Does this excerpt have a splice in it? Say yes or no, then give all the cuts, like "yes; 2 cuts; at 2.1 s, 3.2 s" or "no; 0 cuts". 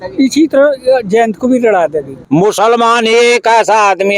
yes; 1 cut; at 2.1 s